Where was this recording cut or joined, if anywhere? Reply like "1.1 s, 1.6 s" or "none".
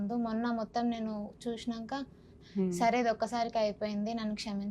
2.4 s